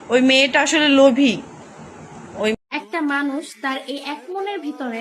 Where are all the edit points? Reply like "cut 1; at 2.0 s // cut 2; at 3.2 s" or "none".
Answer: cut 1; at 2.5 s